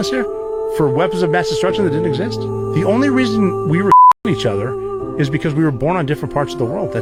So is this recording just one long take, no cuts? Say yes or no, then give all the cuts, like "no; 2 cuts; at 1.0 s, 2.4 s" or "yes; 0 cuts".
yes; 0 cuts